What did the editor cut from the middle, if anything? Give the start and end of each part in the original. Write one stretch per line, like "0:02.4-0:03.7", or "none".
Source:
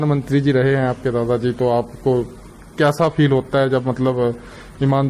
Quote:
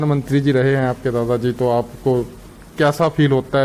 none